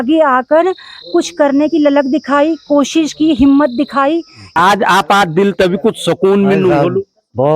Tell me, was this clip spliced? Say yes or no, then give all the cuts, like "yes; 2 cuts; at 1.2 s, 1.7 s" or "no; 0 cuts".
yes; 1 cut; at 4.5 s